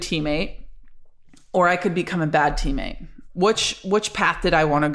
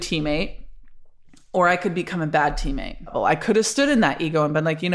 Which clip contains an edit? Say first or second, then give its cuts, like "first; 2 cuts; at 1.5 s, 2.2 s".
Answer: second; 1 cut; at 3.1 s